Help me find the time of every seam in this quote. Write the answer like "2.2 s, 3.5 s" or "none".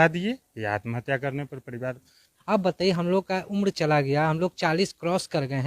2.3 s